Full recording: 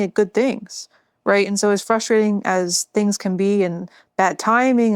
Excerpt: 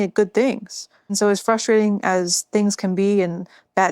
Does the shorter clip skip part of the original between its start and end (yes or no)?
yes